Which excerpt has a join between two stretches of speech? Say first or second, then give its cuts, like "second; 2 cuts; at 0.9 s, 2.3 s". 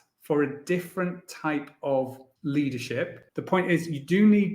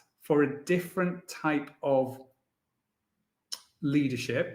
first; 2 cuts; at 2.2 s, 3.3 s